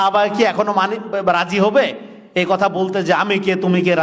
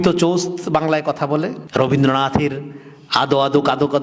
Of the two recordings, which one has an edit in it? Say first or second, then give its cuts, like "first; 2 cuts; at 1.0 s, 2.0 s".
second; 1 cut; at 1.6 s